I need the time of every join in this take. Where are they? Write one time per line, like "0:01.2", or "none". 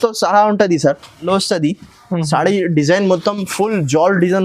0:01.2